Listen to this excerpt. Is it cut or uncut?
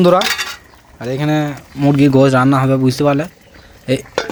uncut